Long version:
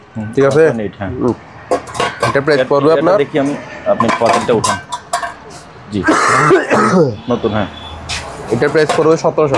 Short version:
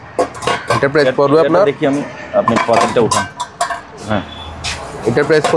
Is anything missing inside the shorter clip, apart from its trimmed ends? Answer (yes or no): yes